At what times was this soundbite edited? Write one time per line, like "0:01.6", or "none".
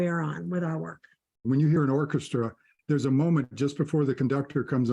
0:01.4
0:02.7